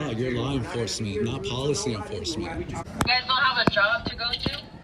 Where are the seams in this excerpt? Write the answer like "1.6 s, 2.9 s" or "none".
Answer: 2.8 s